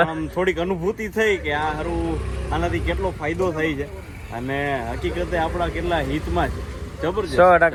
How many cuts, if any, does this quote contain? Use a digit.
0